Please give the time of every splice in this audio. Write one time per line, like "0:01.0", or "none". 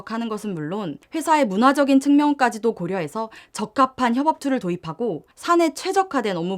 0:01.0
0:05.3